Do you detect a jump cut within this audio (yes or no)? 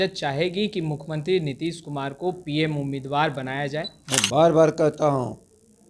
yes